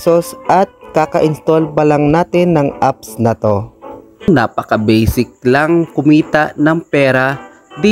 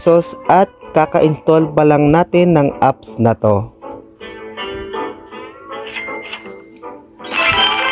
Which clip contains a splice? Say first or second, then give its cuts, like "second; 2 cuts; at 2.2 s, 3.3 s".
first; 1 cut; at 4.3 s